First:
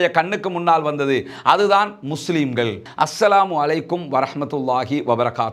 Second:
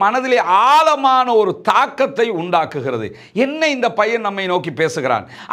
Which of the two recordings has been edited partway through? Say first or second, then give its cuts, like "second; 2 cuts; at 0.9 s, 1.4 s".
first; 1 cut; at 2.8 s